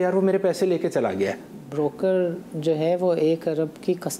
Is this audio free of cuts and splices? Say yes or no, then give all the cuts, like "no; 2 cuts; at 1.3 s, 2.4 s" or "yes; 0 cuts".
no; 1 cut; at 1.6 s